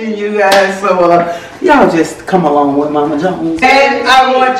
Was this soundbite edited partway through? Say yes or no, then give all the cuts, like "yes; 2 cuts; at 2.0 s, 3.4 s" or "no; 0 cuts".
yes; 1 cut; at 3.6 s